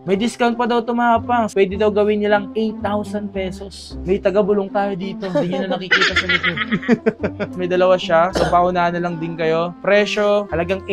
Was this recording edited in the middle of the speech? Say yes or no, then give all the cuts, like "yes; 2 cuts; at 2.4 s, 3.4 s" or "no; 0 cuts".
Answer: no; 0 cuts